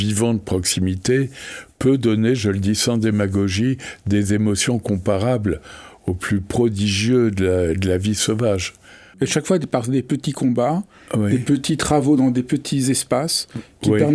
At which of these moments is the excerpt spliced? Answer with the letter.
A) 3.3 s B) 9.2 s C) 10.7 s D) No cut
B